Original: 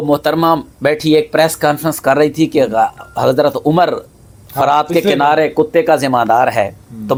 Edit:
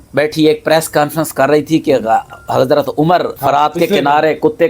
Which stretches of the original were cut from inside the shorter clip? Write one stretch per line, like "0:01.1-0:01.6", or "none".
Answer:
0:04.0-0:04.5